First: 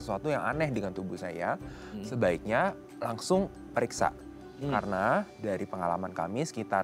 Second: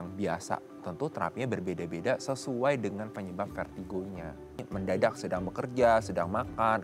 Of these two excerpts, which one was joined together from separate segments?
second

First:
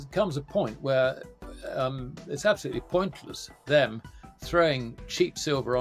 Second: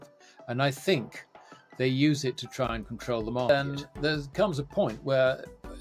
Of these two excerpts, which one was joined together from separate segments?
second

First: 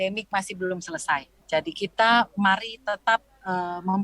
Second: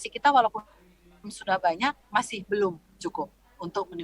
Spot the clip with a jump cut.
first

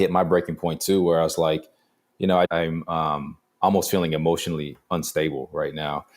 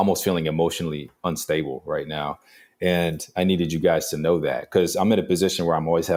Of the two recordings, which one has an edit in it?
first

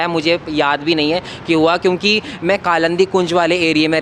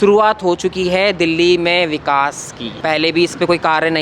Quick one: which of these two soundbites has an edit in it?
second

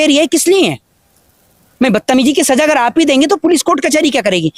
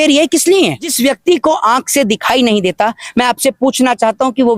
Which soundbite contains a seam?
second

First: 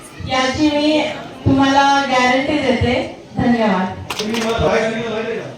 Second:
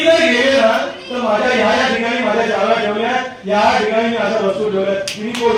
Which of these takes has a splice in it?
first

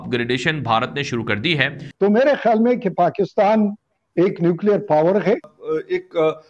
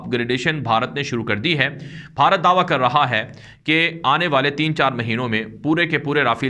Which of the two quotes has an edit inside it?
first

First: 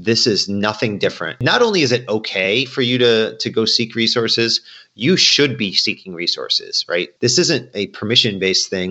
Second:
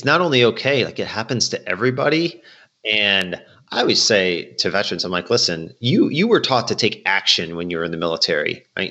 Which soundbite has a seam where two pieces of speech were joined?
first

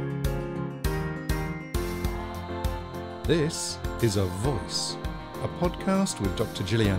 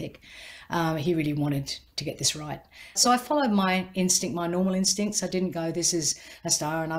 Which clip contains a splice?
second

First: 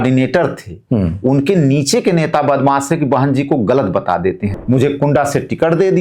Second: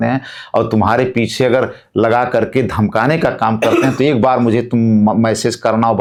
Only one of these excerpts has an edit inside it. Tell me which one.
first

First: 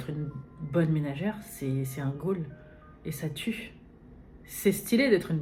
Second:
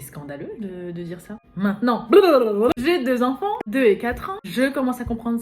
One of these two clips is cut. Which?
second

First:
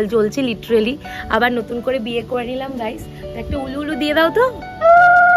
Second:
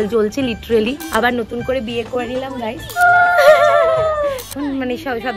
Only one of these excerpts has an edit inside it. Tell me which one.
second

